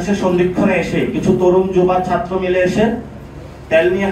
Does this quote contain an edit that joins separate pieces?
no; 0 cuts

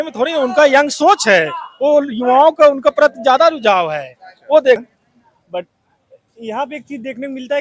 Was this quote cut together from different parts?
yes; 1 cut; at 4.8 s

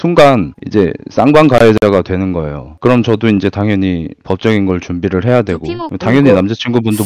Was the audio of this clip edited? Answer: yes; 1 cut; at 5.8 s

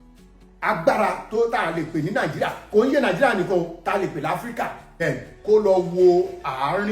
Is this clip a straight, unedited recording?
no; 1 cut; at 4.8 s

